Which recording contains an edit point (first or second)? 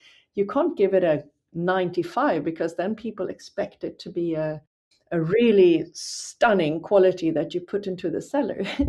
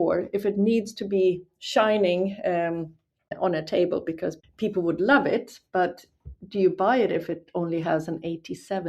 second